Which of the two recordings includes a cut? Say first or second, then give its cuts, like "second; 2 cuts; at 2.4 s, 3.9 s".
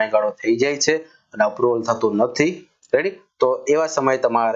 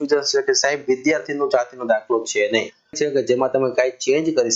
second; 1 cut; at 3.0 s